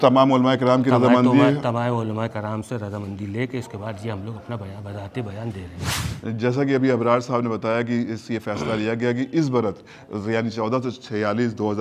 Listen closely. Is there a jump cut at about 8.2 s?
no; 1 cut; at 5.9 s

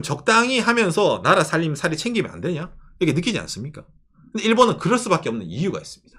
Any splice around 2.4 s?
no; 0 cuts

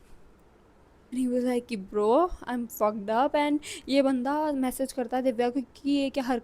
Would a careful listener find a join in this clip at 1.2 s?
yes; 1 cut; at 1.2 s

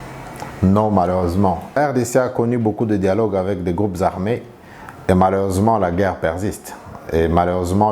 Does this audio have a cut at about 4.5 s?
no; 1 cut; at 1.8 s

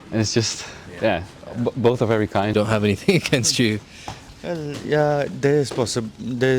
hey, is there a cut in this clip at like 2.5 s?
yes; 1 cut; at 2.5 s

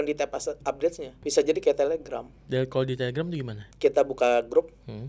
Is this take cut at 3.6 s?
yes; 3 cuts; at 1.1 s, 2.3 s, 3.6 s

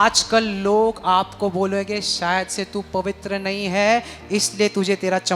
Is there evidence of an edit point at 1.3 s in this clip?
no; 0 cuts

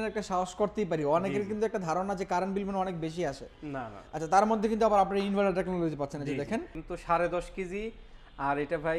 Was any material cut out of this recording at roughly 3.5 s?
no; 1 cut; at 6.8 s

